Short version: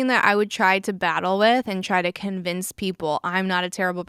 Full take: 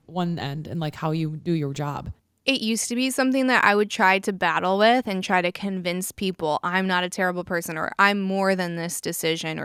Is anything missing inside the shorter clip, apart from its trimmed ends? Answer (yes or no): no